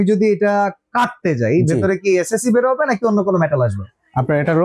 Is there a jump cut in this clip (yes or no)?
no